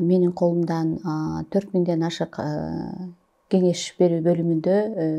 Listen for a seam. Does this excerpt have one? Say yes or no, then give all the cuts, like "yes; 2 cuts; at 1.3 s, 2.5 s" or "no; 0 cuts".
no; 0 cuts